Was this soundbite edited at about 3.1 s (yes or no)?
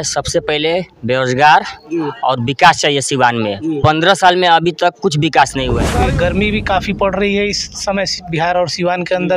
no